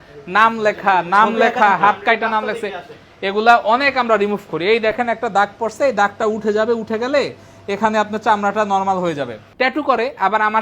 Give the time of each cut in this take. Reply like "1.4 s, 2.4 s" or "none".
9.4 s